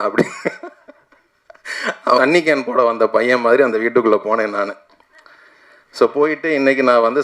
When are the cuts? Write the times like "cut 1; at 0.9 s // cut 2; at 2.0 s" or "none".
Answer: cut 1; at 2.2 s